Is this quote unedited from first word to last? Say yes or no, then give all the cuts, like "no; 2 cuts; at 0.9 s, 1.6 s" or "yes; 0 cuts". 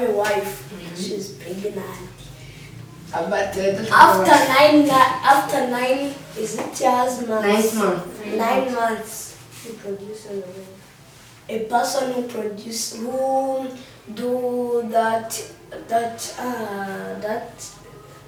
yes; 0 cuts